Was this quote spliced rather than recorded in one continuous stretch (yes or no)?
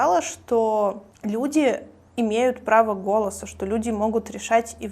yes